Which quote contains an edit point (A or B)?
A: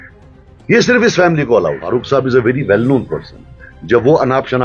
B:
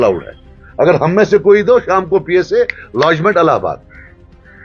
A